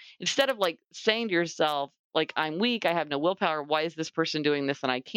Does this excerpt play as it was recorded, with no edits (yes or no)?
yes